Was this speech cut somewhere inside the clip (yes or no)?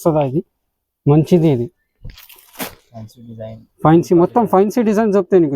no